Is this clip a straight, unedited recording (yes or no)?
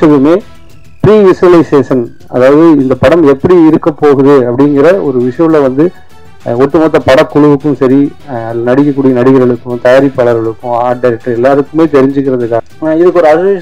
no